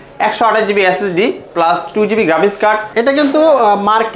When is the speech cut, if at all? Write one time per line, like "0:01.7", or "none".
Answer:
0:02.9